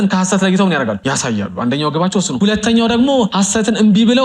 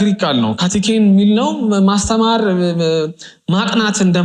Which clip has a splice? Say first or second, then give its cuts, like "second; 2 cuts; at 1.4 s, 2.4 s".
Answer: first; 3 cuts; at 1.0 s, 2.3 s, 3.3 s